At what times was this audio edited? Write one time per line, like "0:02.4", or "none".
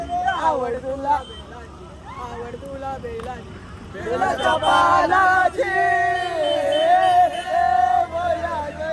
none